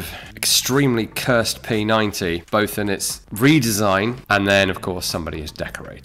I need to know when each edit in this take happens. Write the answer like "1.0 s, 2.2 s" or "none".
4.2 s